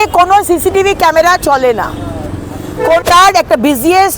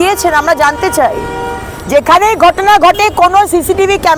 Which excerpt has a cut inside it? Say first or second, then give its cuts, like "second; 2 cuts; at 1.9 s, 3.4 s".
first; 1 cut; at 3.0 s